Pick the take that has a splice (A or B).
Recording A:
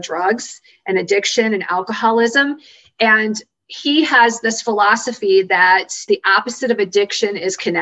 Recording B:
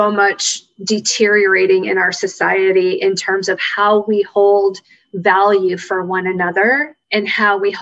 A